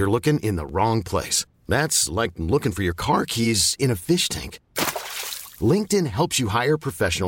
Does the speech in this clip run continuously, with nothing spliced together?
yes; 0 cuts

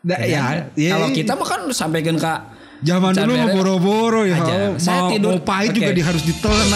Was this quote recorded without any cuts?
yes; 0 cuts

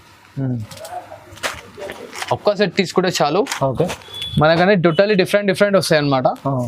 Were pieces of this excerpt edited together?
no; 0 cuts

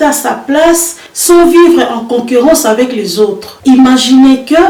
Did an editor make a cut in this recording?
no; 0 cuts

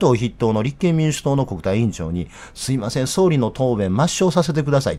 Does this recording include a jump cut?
no; 0 cuts

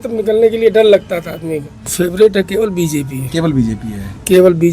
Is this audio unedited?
no; 1 cut; at 1.9 s

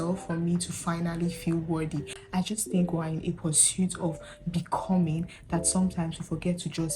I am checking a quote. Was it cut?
yes; 1 cut; at 2.2 s

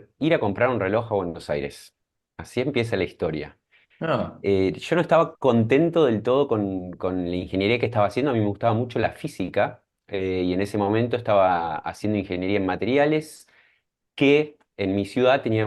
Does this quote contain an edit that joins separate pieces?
no; 0 cuts

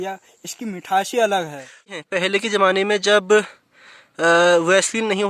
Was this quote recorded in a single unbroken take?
no; 1 cut; at 1.9 s

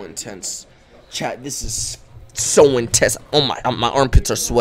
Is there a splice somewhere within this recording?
no; 0 cuts

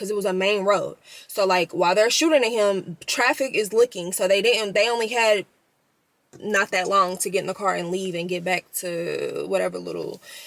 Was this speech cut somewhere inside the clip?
no; 0 cuts

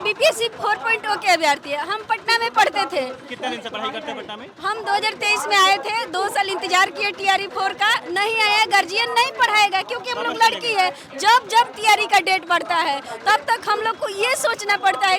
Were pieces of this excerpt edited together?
no; 0 cuts

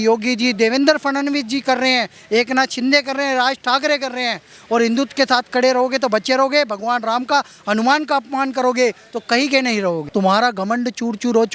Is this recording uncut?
no; 1 cut; at 10.1 s

